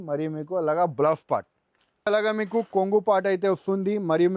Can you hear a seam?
yes; 1 cut; at 2.1 s

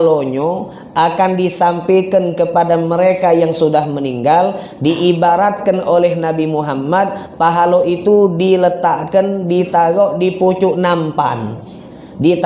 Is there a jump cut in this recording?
no; 0 cuts

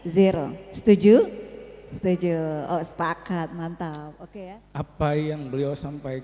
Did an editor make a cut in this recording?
yes; 1 cut; at 4.1 s

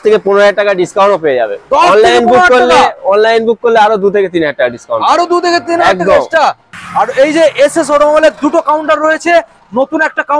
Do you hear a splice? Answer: yes; 1 cut; at 6.8 s

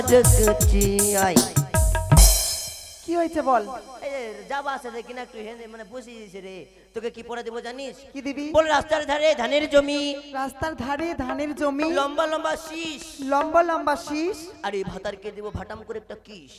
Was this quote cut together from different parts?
no; 0 cuts

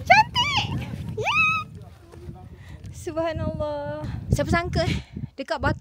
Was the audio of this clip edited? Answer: yes; 1 cut; at 4.1 s

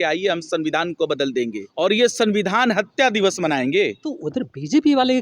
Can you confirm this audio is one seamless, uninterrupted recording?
no; 2 cuts; at 1.6 s, 4.2 s

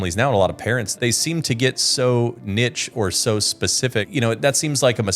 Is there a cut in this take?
yes; 2 cuts; at 0.9 s, 4.1 s

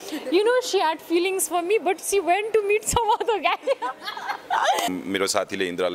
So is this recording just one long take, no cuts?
no; 1 cut; at 4.9 s

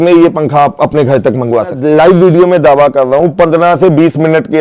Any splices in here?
yes; 1 cut; at 1.8 s

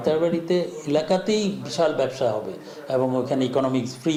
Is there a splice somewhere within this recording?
no; 0 cuts

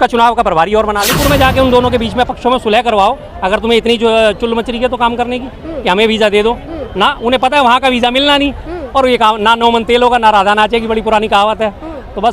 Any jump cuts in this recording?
yes; 1 cut; at 1.1 s

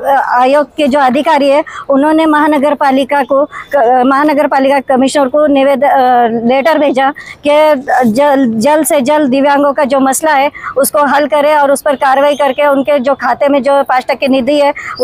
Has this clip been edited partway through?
no; 0 cuts

